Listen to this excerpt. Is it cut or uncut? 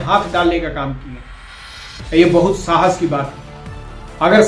uncut